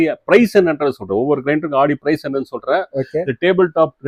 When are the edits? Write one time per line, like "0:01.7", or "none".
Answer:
none

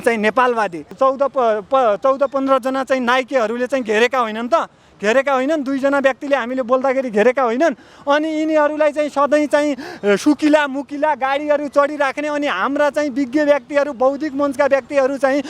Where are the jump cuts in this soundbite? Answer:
0:00.9

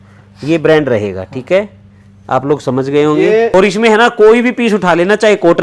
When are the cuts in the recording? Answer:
0:03.5

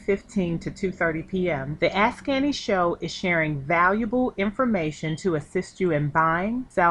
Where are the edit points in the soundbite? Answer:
none

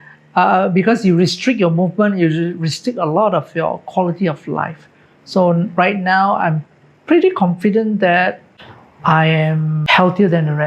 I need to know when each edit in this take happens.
0:08.5
0:09.8

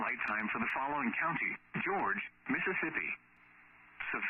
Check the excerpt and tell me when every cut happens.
none

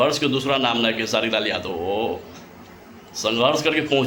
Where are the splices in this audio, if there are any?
none

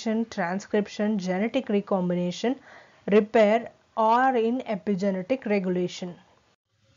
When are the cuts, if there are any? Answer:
0:00.9

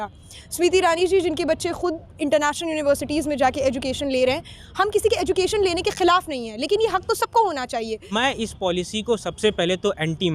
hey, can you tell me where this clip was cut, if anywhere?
0:08.1

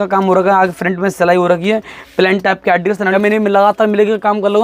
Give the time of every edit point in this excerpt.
0:03.2

